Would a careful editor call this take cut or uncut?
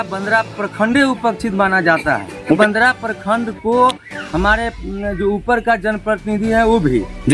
cut